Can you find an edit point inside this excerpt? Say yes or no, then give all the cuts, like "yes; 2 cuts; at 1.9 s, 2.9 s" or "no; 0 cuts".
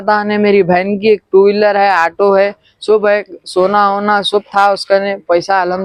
no; 0 cuts